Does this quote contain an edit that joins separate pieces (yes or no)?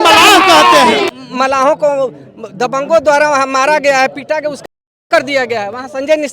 yes